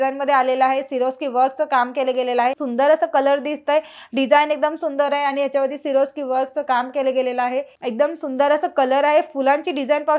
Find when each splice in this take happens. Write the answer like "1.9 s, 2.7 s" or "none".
2.6 s, 7.8 s